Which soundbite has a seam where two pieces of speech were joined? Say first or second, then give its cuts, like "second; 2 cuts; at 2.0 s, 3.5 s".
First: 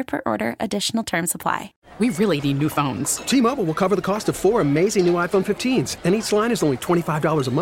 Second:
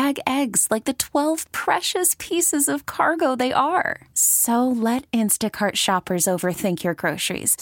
first; 1 cut; at 1.8 s